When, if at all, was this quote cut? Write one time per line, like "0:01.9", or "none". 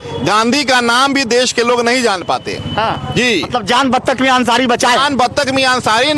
none